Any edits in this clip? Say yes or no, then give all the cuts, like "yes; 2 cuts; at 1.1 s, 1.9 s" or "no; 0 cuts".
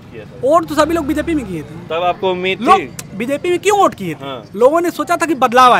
no; 0 cuts